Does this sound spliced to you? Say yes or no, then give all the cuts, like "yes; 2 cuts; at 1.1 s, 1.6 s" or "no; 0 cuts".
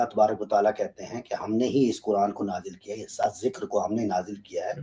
no; 0 cuts